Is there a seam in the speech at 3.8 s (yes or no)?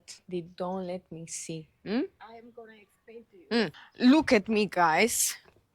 yes